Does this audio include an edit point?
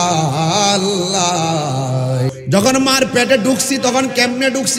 yes; 1 cut; at 2.3 s

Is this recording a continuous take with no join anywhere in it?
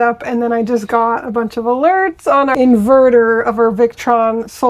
yes; 0 cuts

